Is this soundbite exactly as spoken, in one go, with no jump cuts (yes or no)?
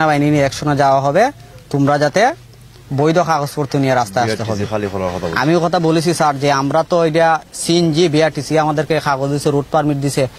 yes